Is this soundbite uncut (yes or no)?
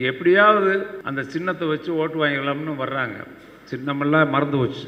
no